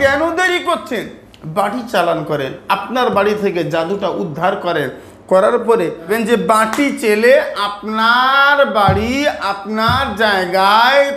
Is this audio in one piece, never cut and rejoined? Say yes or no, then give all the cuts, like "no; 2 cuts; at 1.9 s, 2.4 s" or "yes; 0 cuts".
no; 1 cut; at 6.1 s